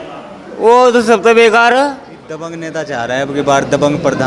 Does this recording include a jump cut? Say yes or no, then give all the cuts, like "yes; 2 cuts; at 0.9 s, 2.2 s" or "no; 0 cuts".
yes; 1 cut; at 2.4 s